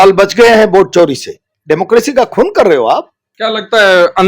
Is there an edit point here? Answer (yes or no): yes